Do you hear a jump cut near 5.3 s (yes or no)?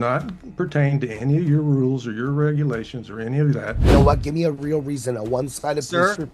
no